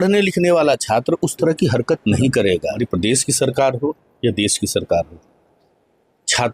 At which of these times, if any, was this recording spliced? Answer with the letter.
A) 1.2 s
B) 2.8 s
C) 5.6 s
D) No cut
B